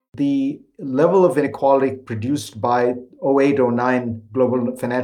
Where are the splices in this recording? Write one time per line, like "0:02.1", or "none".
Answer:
0:01.5